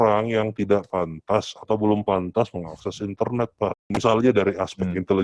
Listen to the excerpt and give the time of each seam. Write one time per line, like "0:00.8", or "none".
0:03.9